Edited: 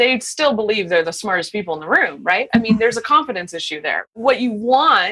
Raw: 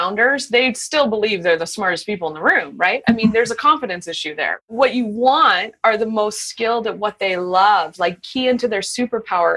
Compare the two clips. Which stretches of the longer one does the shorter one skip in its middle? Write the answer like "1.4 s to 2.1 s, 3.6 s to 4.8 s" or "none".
none